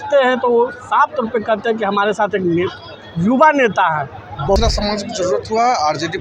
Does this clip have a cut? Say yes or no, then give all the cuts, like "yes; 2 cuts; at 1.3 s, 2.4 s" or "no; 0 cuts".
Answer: yes; 1 cut; at 4.6 s